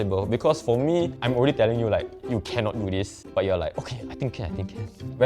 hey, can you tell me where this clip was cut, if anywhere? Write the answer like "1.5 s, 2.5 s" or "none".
1.2 s, 3.2 s

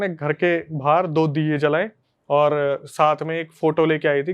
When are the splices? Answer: 2.0 s

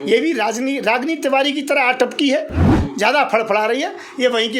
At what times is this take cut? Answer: 2.7 s

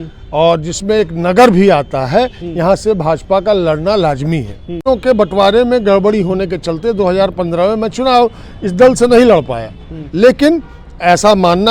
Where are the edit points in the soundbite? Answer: 4.8 s

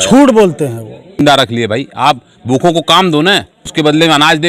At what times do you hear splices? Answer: 1.2 s, 3.7 s

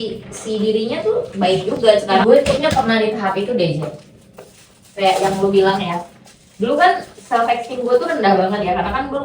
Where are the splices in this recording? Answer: 2.1 s

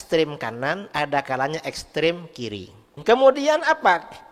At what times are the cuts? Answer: 3.0 s

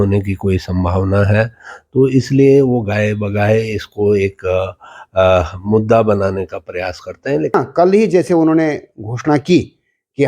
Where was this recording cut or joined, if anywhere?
7.5 s

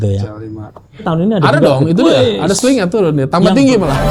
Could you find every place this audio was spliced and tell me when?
1.0 s

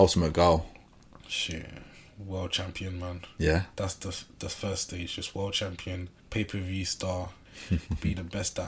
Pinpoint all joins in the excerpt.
6.1 s, 7.5 s

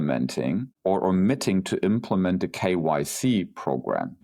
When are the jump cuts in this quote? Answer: none

